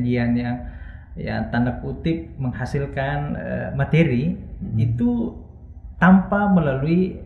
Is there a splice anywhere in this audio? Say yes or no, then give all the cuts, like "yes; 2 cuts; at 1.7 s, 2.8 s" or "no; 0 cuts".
no; 0 cuts